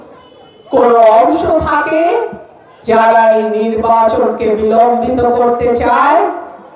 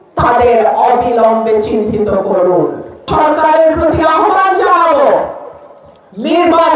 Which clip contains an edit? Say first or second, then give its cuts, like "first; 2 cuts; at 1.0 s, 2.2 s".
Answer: second; 1 cut; at 3.1 s